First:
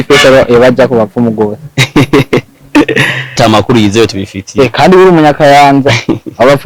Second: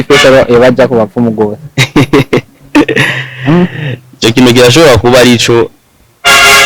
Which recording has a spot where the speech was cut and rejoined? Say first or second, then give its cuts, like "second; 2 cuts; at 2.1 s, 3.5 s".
first; 1 cut; at 3.4 s